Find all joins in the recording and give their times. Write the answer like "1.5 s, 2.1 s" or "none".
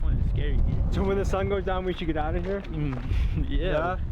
0.9 s